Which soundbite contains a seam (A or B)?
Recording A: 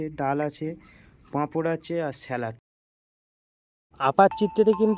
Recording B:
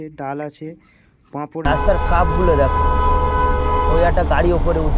B